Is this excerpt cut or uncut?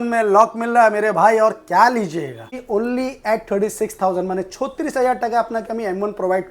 cut